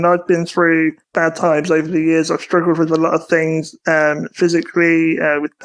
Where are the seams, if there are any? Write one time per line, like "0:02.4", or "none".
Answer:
0:01.0